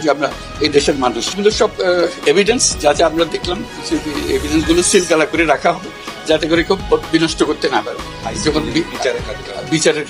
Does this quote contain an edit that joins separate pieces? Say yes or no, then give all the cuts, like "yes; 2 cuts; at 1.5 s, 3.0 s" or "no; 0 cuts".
yes; 1 cut; at 1.3 s